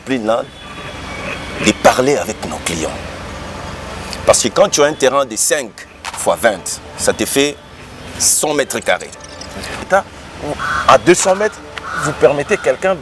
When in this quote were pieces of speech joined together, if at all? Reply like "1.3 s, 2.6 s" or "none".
9.9 s